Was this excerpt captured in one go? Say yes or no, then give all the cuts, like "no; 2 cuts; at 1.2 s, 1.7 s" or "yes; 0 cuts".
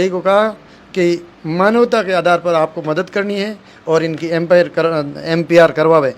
yes; 0 cuts